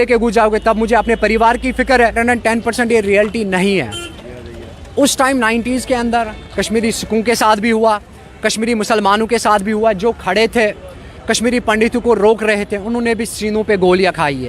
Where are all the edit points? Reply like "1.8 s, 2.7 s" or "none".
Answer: 2.1 s